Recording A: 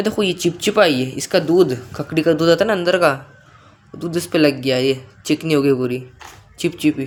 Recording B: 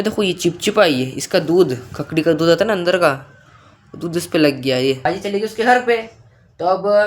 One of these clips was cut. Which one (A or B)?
B